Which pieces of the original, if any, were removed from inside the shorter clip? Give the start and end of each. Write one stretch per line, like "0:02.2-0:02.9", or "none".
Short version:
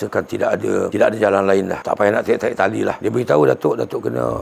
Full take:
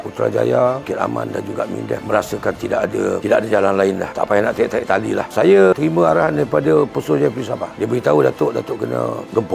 0:05.3-0:07.7